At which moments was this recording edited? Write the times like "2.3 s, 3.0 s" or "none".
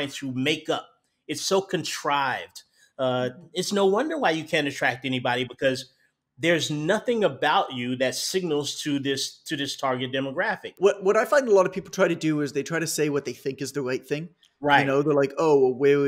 10.7 s